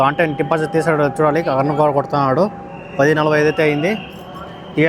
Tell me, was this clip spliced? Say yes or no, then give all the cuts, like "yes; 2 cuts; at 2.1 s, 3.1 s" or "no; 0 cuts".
no; 0 cuts